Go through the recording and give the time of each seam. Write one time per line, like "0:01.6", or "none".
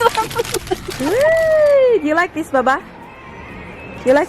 0:00.9